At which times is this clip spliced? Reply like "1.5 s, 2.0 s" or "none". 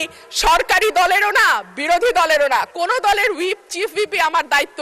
none